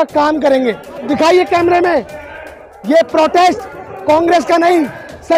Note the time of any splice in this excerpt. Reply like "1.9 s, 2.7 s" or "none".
1.0 s